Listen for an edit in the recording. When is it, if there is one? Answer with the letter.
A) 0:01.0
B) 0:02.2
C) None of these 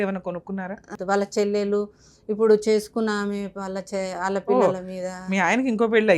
A